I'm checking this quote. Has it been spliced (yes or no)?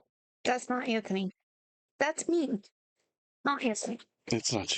no